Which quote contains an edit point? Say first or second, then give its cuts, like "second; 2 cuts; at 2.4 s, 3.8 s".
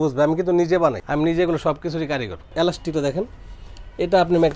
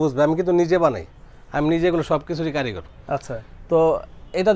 first; 2 cuts; at 1.0 s, 2.5 s